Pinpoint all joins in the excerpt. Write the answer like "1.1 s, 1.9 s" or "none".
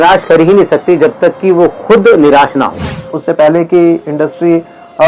3.1 s